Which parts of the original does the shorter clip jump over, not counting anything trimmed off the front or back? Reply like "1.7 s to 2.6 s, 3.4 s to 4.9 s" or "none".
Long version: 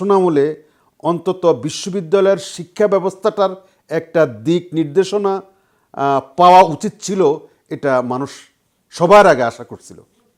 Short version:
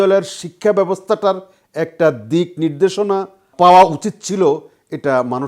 5.6 s to 6.3 s

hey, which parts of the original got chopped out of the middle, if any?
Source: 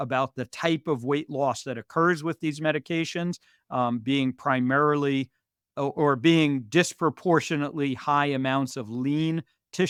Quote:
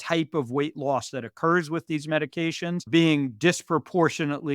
3.4 s to 6.2 s

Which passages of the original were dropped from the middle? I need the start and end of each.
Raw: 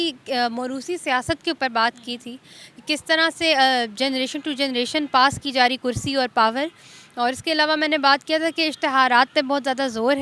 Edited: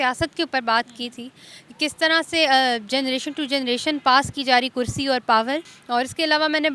6.8 s to 7.0 s

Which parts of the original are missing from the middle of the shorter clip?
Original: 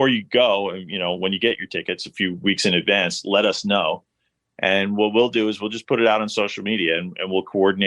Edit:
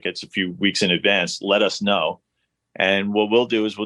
none

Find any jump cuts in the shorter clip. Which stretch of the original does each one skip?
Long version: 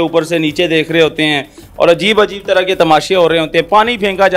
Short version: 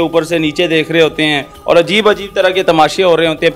1.5 s to 1.6 s

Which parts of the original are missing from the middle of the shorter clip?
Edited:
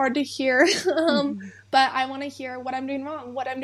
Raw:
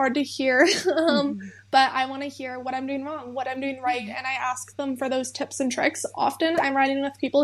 none

